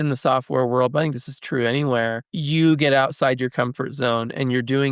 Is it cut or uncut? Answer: cut